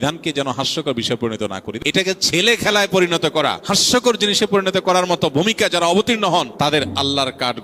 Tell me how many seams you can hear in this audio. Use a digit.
3